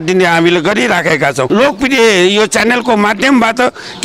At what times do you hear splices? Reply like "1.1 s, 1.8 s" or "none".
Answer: 1.5 s